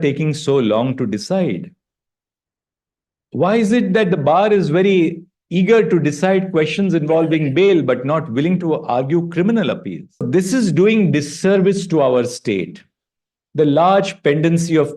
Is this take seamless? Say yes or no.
no